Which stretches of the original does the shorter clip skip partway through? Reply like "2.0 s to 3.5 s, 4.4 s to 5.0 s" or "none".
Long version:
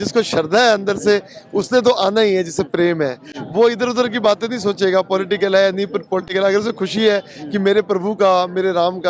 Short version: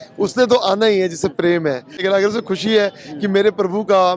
3.3 s to 6.3 s

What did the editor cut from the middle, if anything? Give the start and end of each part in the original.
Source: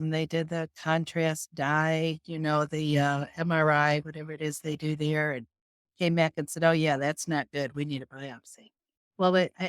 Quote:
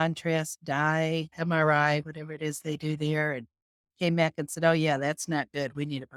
2.2 s to 3.3 s

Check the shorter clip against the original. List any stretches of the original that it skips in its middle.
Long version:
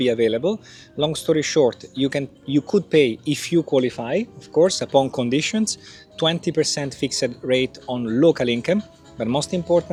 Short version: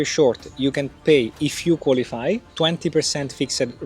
2.4 s to 2.9 s, 4.3 s to 6.1 s

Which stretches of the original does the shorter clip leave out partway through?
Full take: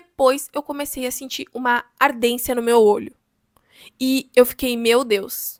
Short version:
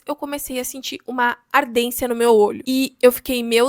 3.1 s to 3.9 s

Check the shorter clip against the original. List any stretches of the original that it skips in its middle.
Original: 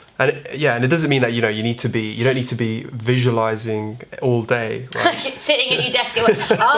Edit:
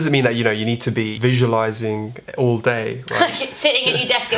2.1 s to 3.0 s

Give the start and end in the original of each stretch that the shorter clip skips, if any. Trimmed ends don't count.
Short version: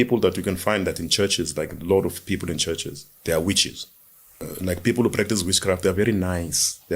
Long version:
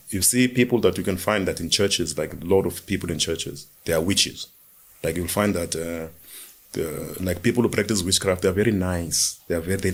5.0 s to 7.0 s

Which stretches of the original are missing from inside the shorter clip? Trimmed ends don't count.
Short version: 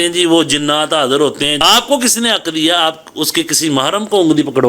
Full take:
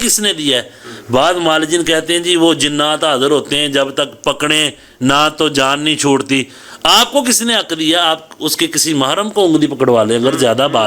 3.7 s to 6.8 s

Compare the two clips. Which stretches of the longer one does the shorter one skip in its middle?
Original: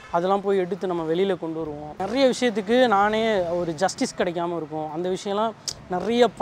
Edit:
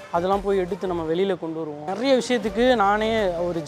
1.8 s to 1.9 s

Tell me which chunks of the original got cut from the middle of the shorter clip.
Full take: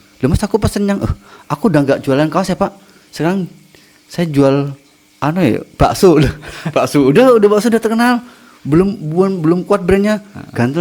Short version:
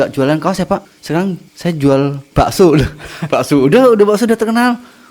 3.0 s to 3.6 s, 4.8 s to 5.7 s

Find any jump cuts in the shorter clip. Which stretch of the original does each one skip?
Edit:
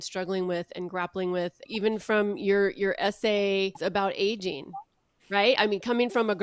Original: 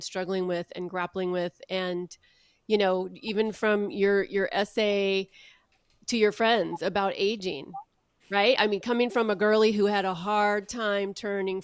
1.6 s to 3.1 s, 5.3 s to 6.8 s

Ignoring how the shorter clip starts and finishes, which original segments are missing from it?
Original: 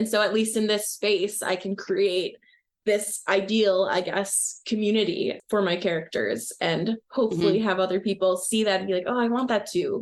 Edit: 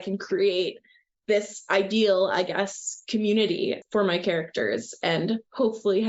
none

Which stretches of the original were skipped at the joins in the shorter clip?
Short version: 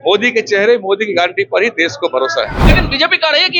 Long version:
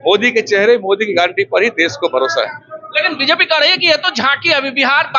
2.6 s to 2.9 s

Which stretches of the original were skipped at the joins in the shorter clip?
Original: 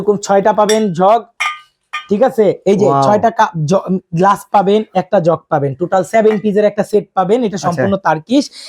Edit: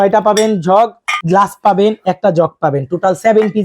1.5 s to 4.0 s

